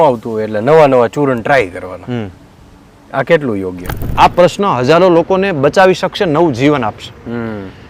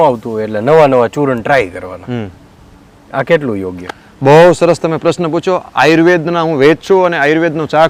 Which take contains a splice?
first; 1 cut; at 4.1 s

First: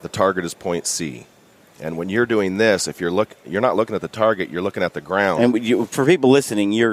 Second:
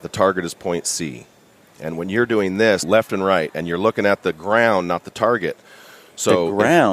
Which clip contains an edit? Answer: second; 1 cut; at 2.8 s

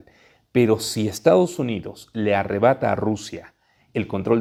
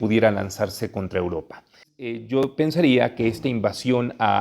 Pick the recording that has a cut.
second; 1 cut; at 1.8 s

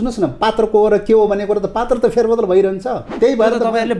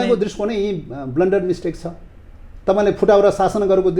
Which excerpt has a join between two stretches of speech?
first; 1 cut; at 3.1 s

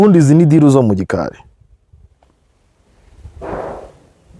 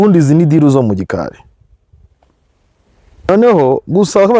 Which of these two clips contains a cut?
second; 1 cut; at 3.3 s

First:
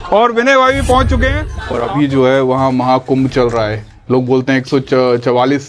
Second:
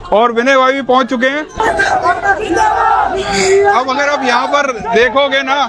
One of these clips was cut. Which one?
first; 1 cut; at 1.4 s

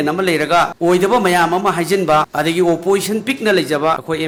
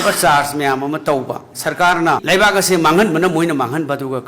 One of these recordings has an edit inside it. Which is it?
second; 1 cut; at 2.2 s

